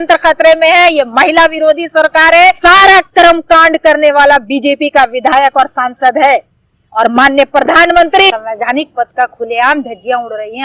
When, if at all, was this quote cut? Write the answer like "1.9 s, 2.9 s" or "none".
2.6 s, 8.3 s